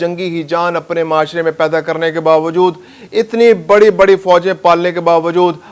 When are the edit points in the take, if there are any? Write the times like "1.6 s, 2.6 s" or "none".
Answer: none